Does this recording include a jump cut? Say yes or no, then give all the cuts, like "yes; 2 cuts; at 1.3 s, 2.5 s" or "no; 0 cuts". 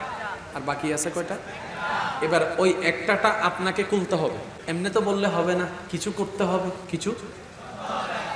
yes; 3 cuts; at 4.5 s, 5.8 s, 6.8 s